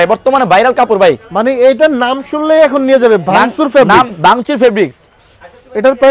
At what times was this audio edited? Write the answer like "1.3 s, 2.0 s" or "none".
none